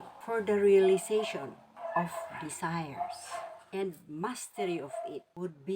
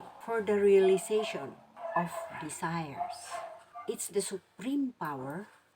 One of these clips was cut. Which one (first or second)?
first